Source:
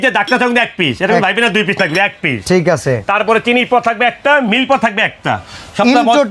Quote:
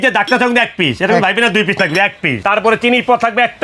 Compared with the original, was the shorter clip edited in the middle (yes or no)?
yes